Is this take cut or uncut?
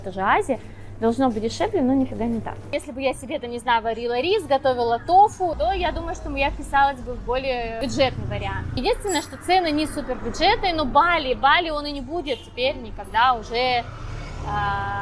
cut